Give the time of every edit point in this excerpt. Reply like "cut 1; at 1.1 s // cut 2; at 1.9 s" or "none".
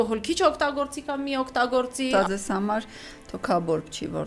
cut 1; at 2.1 s